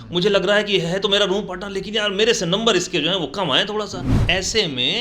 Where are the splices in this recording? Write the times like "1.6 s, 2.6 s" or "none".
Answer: 4.1 s